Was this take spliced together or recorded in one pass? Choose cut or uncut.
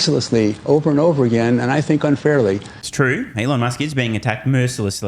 uncut